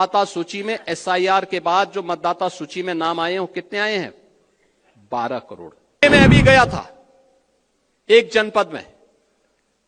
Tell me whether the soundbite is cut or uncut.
cut